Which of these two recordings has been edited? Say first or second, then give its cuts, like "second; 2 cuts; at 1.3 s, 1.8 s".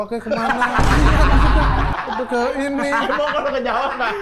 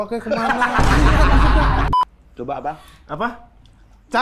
second; 1 cut; at 1.9 s